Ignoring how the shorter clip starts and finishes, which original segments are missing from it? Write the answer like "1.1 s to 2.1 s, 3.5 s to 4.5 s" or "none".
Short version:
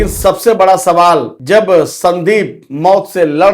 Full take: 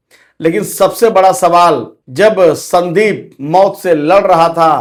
1.9 s to 2.0 s